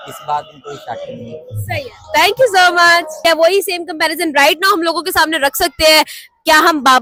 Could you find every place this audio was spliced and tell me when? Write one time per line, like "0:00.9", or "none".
none